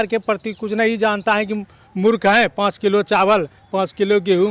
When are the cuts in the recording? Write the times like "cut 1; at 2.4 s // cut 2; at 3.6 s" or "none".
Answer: none